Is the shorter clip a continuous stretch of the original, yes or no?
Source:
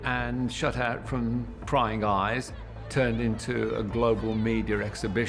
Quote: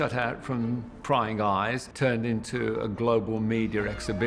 no